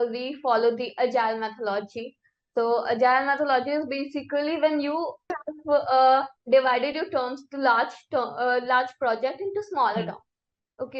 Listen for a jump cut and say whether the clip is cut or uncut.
cut